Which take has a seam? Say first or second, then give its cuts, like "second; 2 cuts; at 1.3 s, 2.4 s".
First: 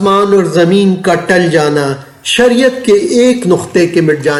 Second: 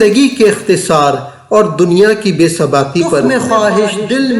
second; 1 cut; at 3.2 s